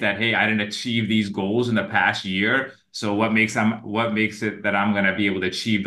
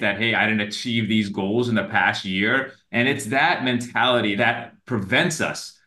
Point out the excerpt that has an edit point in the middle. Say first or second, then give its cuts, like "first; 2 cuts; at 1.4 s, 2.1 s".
second; 2 cuts; at 2.8 s, 4.3 s